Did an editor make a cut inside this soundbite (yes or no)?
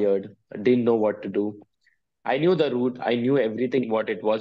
no